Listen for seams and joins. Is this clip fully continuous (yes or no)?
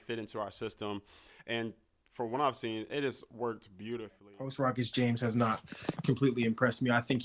no